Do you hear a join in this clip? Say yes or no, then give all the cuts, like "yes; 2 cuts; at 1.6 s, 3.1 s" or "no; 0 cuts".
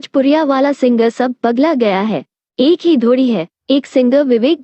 yes; 1 cut; at 3.5 s